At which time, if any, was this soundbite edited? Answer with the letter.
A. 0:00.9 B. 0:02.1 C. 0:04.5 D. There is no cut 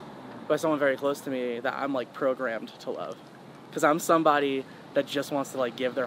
D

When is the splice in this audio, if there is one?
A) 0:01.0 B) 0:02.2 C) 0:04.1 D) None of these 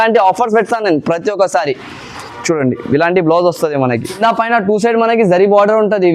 C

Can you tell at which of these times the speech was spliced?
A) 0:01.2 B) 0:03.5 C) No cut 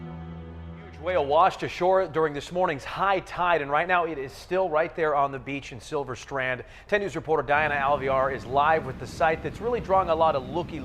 B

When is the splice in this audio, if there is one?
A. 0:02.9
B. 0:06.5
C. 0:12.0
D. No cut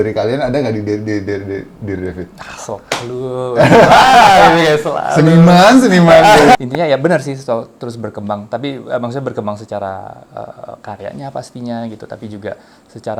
B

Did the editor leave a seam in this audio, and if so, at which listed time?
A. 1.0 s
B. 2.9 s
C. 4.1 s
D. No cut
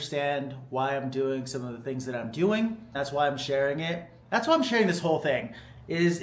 B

